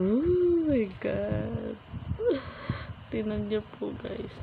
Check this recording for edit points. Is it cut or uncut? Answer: uncut